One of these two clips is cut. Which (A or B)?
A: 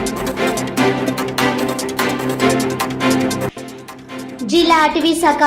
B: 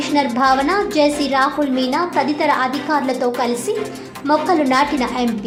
A